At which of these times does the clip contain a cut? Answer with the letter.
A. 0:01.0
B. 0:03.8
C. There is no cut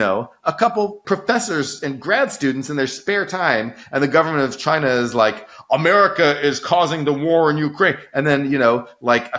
A